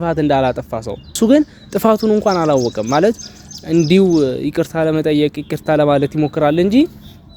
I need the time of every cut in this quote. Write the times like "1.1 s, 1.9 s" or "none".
1.1 s